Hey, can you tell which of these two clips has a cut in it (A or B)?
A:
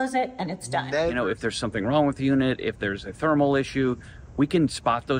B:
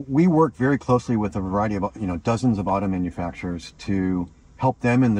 A